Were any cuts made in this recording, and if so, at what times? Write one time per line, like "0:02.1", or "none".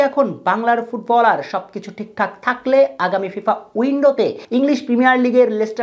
0:04.4